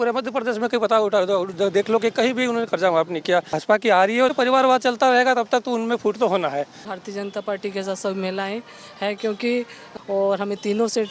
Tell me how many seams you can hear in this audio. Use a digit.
4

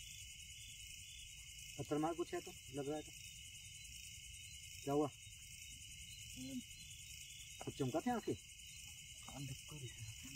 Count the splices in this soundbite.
0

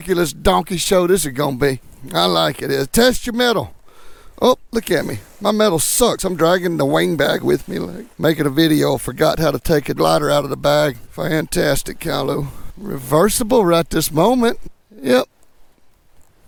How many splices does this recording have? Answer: 0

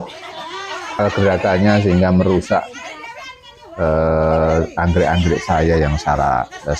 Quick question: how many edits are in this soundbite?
1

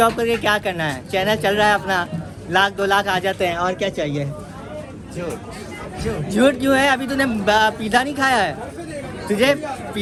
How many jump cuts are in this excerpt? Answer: 0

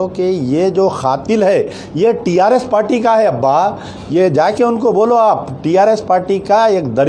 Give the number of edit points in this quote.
0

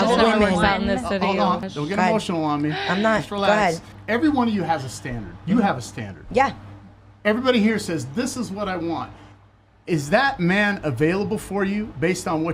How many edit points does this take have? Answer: 2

